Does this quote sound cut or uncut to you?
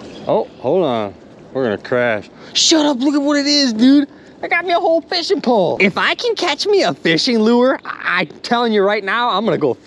cut